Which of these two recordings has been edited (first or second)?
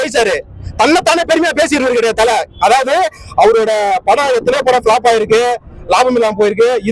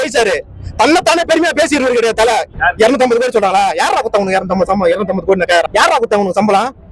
second